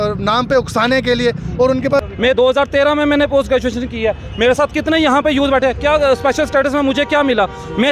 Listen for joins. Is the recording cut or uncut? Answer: cut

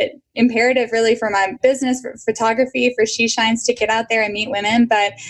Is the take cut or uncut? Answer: uncut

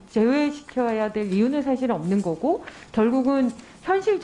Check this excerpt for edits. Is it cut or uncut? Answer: uncut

